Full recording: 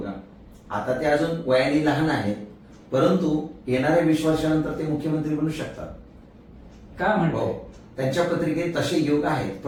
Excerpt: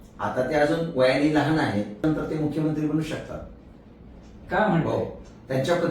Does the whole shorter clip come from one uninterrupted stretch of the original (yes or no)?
no